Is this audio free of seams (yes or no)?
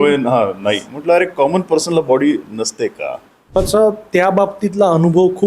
no